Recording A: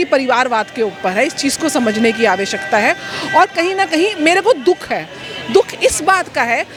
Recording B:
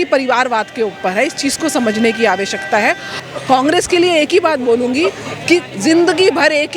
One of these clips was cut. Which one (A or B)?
B